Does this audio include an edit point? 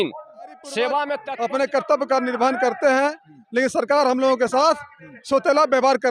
yes; 1 cut; at 1.2 s

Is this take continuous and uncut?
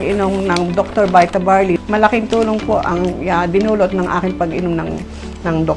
no; 1 cut; at 1.8 s

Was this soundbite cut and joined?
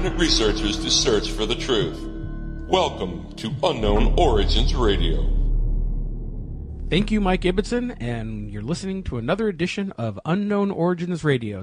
yes; 1 cut; at 7.4 s

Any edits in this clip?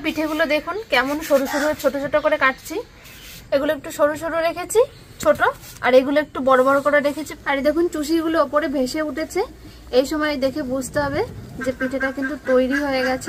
yes; 2 cuts; at 3.3 s, 7.3 s

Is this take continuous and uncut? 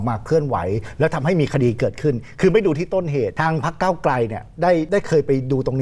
no; 2 cuts; at 3.3 s, 4.9 s

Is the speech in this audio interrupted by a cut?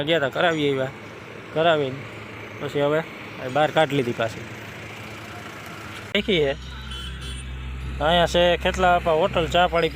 yes; 1 cut; at 6.2 s

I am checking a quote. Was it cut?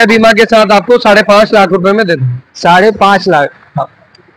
no; 0 cuts

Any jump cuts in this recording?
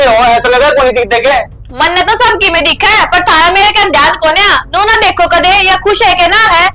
no; 0 cuts

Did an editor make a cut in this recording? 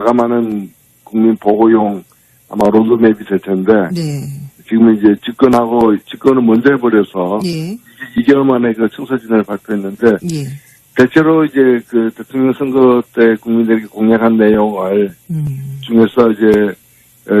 yes; 1 cut; at 9.9 s

